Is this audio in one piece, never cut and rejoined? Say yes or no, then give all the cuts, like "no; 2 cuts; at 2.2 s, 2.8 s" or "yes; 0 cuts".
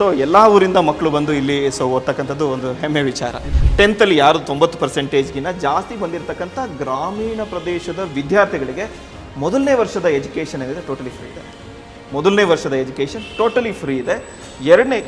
no; 1 cut; at 3.4 s